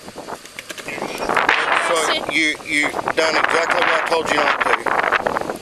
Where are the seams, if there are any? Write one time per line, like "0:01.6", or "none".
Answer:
none